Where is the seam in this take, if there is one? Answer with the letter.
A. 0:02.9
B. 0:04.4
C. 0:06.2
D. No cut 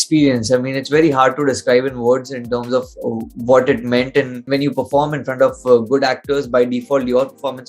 B